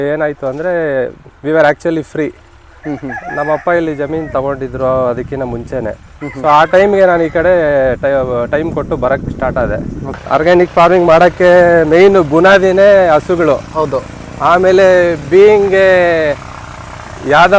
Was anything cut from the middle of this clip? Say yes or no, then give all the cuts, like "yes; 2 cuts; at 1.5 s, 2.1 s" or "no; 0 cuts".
yes; 1 cut; at 10.2 s